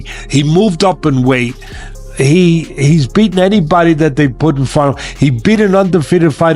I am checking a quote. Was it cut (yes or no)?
no